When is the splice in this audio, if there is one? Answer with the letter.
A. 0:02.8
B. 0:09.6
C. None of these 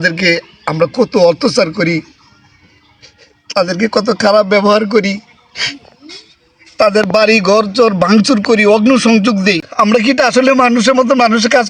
B